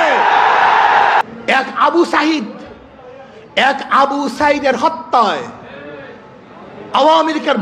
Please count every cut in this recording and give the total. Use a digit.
1